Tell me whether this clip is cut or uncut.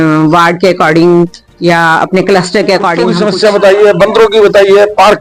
cut